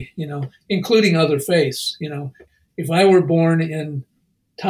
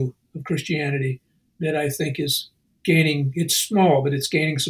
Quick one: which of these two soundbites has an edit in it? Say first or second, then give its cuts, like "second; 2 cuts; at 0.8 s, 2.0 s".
first; 1 cut; at 2.4 s